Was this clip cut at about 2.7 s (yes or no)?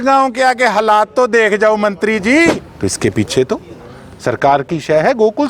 yes